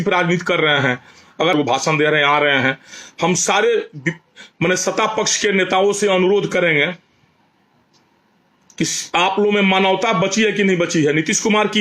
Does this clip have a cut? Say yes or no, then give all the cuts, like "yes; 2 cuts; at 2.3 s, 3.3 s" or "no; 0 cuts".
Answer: yes; 1 cut; at 1.5 s